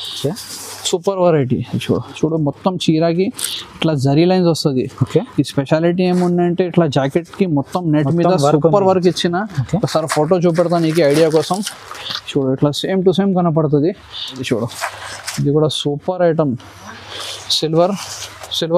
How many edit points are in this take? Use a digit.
2